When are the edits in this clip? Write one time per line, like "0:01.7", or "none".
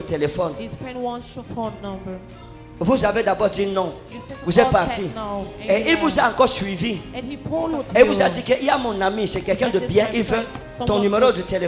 none